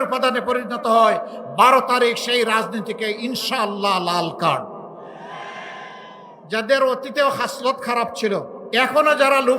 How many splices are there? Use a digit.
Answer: 2